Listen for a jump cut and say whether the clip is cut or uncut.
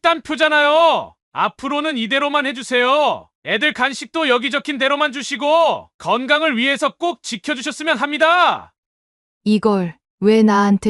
uncut